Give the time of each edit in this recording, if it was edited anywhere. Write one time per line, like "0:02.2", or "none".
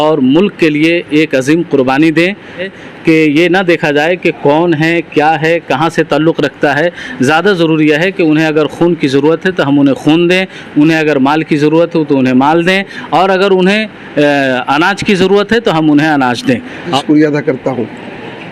0:02.7
0:17.0